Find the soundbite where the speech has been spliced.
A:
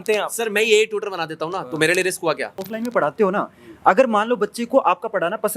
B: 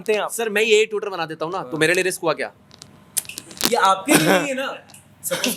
A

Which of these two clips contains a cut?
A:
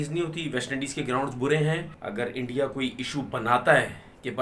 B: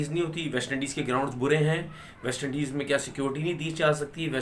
A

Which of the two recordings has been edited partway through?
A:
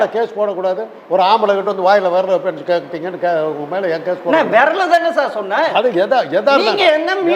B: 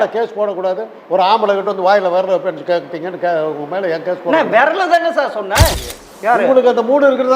B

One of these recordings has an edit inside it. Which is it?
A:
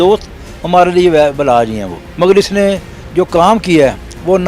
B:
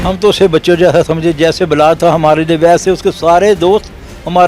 A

